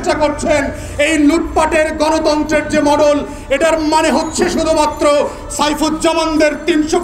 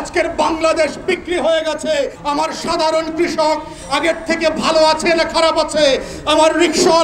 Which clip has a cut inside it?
second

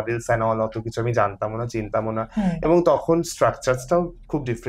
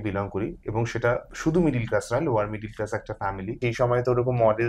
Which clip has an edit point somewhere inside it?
second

